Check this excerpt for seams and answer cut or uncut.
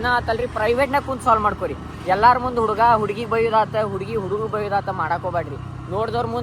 uncut